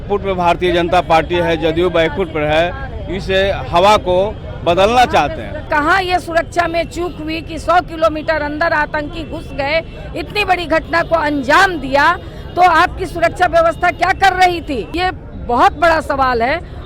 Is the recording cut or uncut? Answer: cut